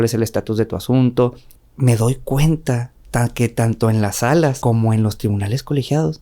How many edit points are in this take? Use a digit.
2